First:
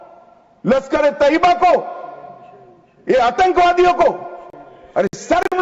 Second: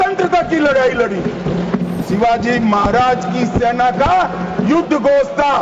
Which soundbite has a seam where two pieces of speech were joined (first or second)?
second